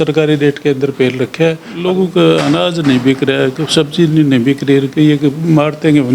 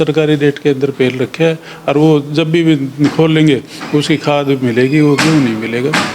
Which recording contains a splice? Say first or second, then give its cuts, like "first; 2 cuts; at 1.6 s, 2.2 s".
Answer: first; 1 cut; at 1.7 s